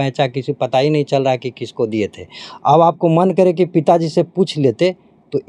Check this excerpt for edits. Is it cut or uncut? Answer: uncut